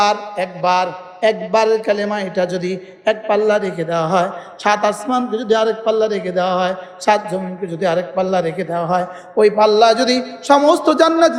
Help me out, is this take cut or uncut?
uncut